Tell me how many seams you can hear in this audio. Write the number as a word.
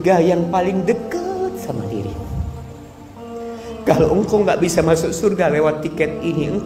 zero